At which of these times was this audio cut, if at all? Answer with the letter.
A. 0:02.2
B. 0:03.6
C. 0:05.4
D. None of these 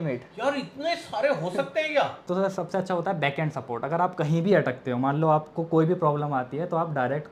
A